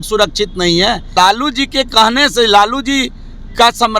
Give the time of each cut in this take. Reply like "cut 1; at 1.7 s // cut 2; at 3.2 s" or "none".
cut 1; at 1.1 s